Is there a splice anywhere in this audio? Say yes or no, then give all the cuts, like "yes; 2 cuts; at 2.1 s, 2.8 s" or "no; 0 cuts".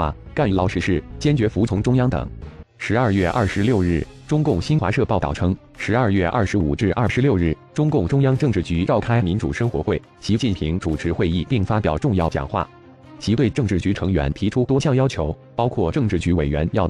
yes; 1 cut; at 1.1 s